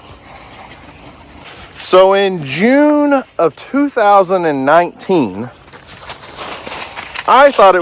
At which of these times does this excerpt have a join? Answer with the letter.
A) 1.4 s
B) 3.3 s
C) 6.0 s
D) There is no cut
A